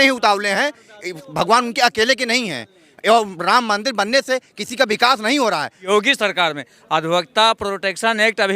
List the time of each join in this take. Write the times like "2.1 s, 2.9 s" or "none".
5.9 s